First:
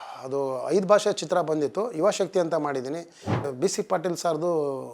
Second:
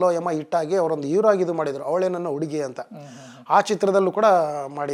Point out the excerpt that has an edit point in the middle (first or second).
first